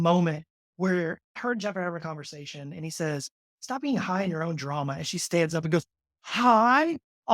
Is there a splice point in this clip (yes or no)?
yes